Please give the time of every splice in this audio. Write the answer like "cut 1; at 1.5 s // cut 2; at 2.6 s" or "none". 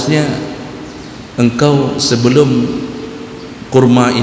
none

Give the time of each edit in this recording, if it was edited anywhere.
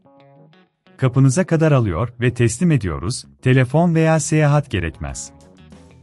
cut 1; at 5.1 s

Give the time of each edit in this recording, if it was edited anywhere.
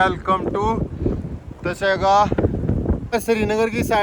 cut 1; at 3.1 s

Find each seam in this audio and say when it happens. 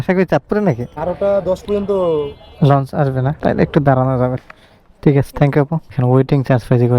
cut 1; at 0.9 s // cut 2; at 4.4 s // cut 3; at 5.9 s

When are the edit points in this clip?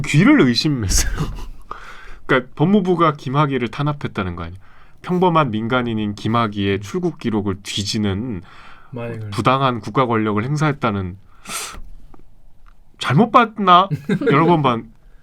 none

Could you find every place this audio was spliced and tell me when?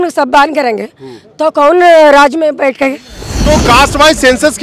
cut 1; at 3.4 s

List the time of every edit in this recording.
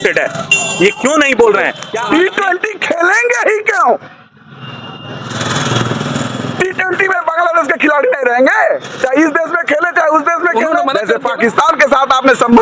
cut 1; at 1.9 s // cut 2; at 11.1 s

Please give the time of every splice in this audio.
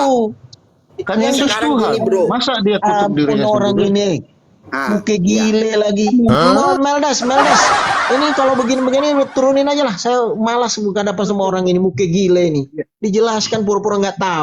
cut 1; at 6.4 s

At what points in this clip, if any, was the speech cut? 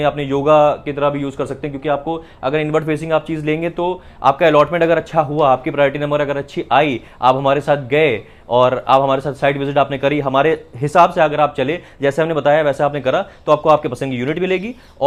none

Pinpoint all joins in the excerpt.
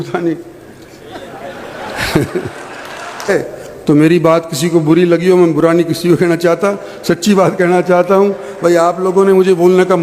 cut 1; at 3.3 s

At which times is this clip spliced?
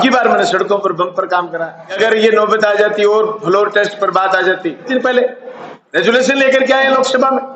cut 1; at 1.9 s // cut 2; at 4.9 s

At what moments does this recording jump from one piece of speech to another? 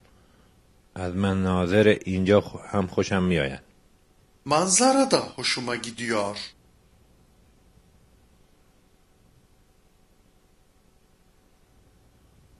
cut 1; at 1.0 s

